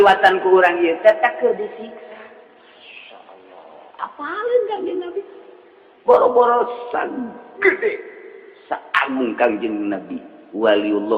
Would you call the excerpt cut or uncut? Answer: uncut